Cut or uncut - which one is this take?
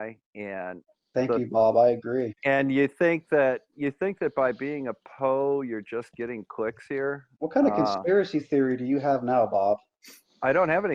uncut